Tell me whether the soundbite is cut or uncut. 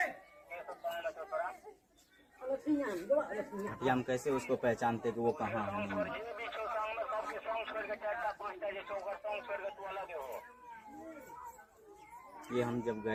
uncut